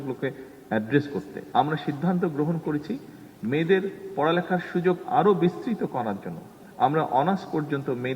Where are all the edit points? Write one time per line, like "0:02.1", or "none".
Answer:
0:01.4